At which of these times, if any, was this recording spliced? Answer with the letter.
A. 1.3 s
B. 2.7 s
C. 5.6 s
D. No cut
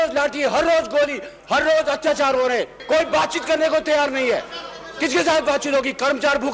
B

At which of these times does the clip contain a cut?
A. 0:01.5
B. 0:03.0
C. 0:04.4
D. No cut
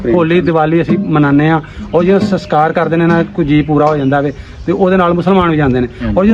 D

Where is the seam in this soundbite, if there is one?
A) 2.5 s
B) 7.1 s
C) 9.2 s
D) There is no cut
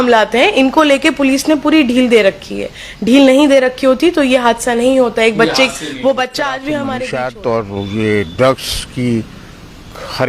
B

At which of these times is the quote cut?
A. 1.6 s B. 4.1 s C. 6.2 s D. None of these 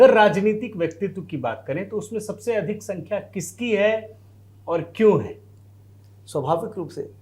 D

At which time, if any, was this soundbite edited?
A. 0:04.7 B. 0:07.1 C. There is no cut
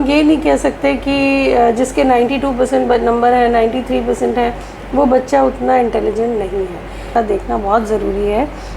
B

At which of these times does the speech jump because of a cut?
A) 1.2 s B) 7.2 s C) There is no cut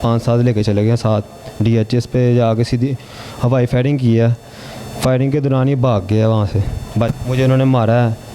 B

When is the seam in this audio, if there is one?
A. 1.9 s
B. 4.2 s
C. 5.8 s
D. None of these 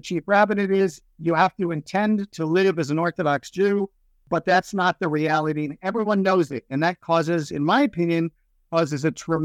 D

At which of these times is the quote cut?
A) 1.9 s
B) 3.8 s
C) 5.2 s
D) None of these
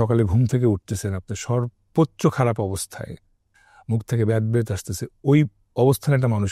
D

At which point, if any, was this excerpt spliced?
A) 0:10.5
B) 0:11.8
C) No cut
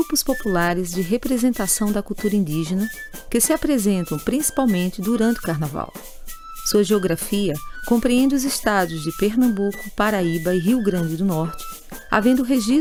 C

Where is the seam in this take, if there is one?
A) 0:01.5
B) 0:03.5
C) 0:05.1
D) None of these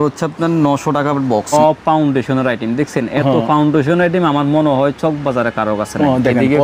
A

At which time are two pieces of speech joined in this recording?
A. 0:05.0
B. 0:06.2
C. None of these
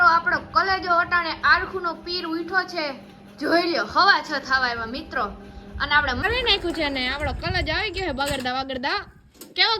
B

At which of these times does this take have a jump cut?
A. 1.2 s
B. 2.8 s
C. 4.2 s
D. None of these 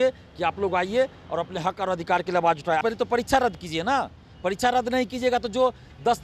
B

